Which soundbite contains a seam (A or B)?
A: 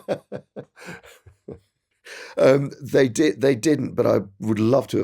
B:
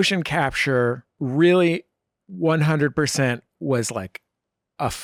A